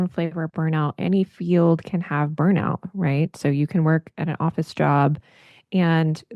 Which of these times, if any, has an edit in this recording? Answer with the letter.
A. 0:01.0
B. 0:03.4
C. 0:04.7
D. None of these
D